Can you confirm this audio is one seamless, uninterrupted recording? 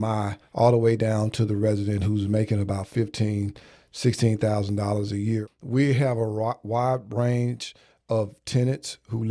no; 1 cut; at 5.4 s

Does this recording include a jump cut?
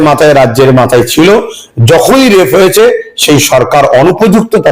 no; 0 cuts

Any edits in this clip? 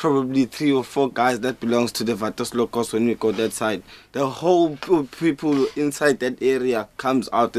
yes; 1 cut; at 3.6 s

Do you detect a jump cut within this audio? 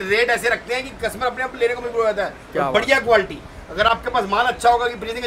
no; 0 cuts

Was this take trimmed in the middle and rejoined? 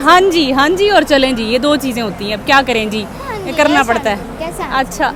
no; 0 cuts

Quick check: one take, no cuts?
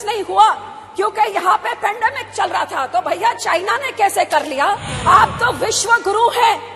no; 1 cut; at 4.9 s

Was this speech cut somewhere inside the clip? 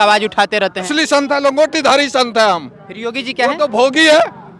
yes; 1 cut; at 0.9 s

